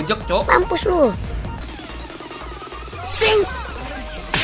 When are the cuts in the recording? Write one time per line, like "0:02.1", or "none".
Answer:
0:01.6

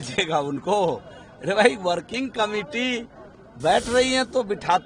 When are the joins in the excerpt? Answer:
none

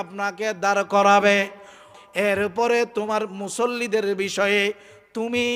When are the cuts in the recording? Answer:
0:01.8

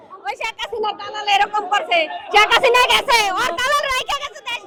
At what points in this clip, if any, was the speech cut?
none

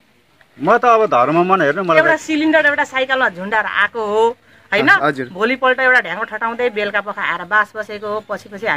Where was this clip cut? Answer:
0:02.0

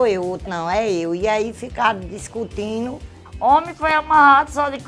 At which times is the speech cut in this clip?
0:03.3

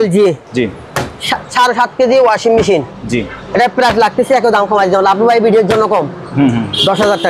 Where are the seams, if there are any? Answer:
none

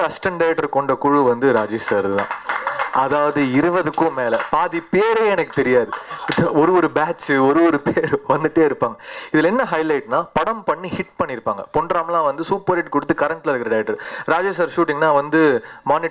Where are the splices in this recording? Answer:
none

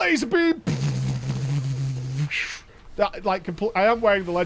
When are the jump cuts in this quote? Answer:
none

